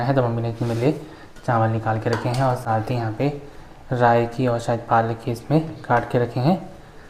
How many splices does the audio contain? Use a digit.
0